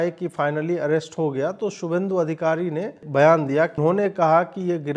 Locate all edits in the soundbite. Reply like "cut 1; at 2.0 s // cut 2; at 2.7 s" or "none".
cut 1; at 3.0 s // cut 2; at 3.7 s